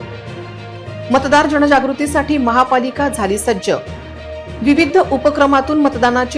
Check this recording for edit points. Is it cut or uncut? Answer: cut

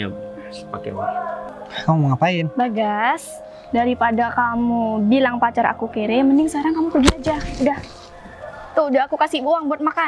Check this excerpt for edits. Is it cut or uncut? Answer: cut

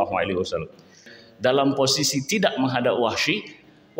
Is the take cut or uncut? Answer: cut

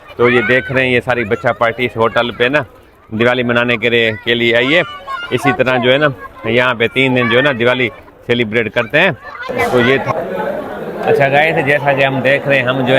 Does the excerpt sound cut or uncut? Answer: uncut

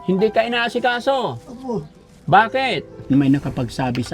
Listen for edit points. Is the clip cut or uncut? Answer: cut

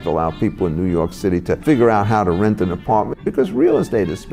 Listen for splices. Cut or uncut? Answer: cut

